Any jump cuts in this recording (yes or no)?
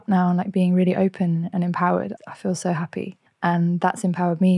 yes